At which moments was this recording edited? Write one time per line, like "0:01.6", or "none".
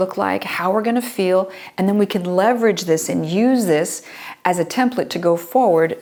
none